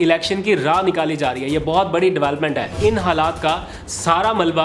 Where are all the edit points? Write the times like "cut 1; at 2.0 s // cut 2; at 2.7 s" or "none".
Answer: cut 1; at 2.7 s